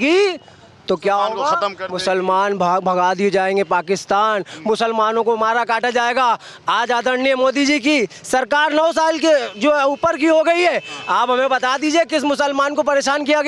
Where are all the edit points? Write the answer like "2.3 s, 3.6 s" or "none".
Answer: none